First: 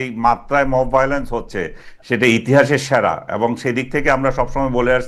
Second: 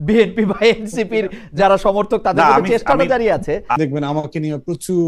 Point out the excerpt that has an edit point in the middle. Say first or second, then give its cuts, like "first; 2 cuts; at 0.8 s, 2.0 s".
second; 1 cut; at 3.8 s